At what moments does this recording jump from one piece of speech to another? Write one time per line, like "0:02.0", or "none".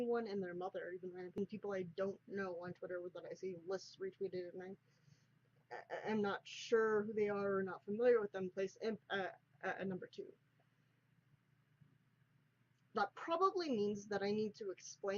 0:06.1